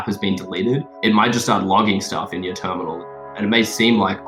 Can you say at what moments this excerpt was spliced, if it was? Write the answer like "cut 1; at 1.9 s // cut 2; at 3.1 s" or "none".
cut 1; at 0.9 s // cut 2; at 3.3 s